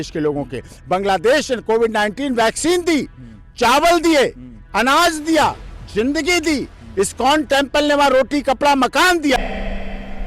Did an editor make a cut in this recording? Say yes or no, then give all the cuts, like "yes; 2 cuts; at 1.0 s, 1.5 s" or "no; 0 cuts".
yes; 1 cut; at 9.4 s